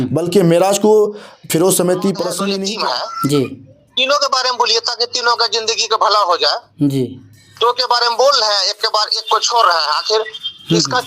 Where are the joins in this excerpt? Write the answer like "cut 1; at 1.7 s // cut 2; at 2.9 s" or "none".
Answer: cut 1; at 2.6 s